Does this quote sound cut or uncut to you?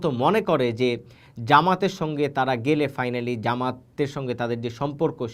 uncut